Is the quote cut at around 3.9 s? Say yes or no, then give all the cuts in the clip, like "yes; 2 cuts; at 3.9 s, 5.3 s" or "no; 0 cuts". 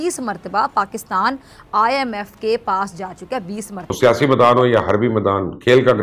yes; 1 cut; at 3.9 s